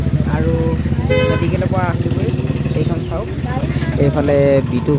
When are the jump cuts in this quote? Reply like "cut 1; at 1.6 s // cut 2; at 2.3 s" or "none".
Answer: none